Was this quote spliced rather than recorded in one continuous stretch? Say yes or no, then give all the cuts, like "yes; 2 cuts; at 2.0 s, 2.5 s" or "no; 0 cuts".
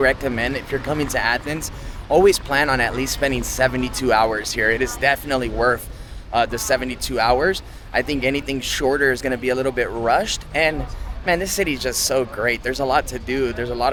no; 0 cuts